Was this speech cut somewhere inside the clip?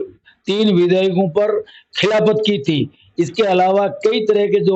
no; 0 cuts

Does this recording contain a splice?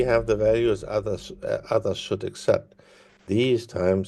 no; 0 cuts

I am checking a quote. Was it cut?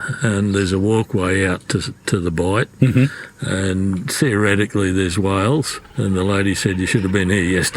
yes; 1 cut; at 5.8 s

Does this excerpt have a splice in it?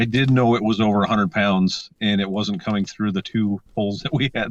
no; 0 cuts

